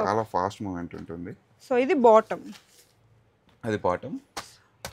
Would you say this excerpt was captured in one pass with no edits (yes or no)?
yes